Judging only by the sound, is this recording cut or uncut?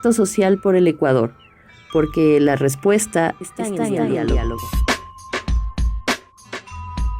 cut